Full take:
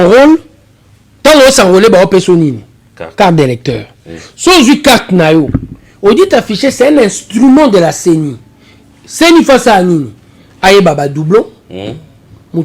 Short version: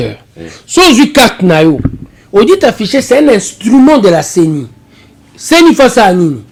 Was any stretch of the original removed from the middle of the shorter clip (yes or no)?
no